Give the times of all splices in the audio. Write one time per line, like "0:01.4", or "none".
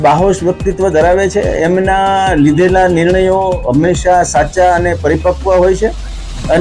none